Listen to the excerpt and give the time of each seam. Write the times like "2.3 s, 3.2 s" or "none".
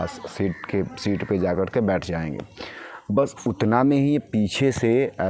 none